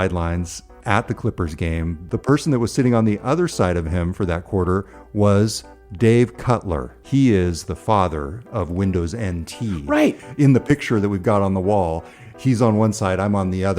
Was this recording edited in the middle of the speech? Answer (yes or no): yes